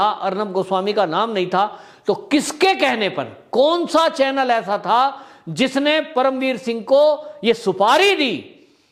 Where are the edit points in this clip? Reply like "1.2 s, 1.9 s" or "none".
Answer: none

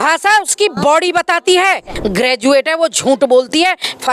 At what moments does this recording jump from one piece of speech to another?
1.9 s

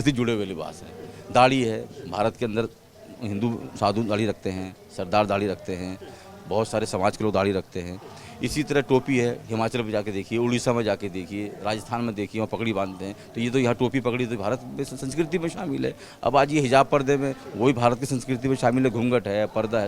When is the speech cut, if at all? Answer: none

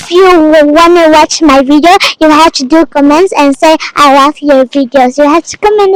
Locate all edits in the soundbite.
none

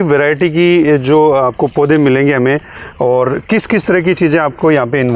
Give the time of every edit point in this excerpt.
none

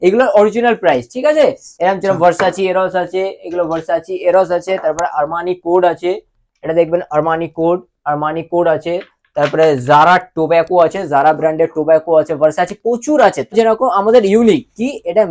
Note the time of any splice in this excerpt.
13.5 s

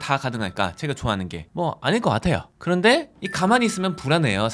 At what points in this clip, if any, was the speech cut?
1.4 s, 2.7 s

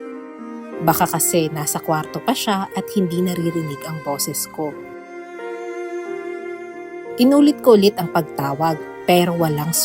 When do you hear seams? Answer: 7.2 s

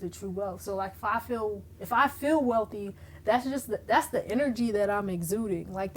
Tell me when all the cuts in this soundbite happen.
none

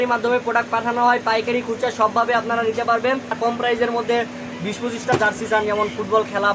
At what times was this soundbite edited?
3.3 s

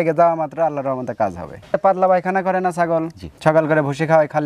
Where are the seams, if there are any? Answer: 1.6 s

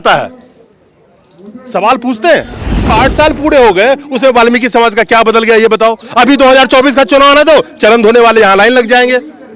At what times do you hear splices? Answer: 2.9 s

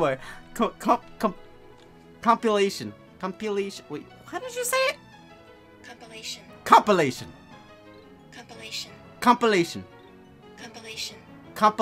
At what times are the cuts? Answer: none

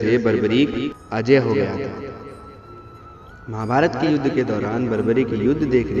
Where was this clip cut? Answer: 1.0 s

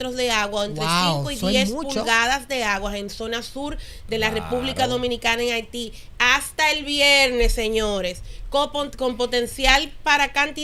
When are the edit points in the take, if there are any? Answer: none

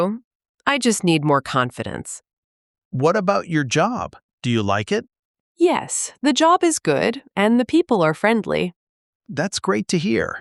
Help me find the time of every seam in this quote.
2.1 s, 5.1 s, 8.8 s

